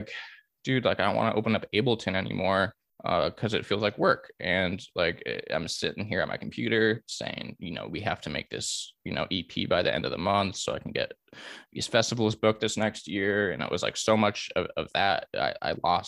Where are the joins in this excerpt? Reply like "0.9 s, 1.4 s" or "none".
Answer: none